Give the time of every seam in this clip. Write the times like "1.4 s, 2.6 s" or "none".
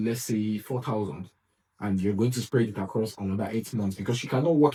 none